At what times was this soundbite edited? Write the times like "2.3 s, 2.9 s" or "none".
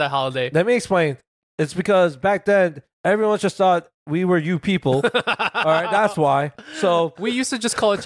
1.3 s, 7.1 s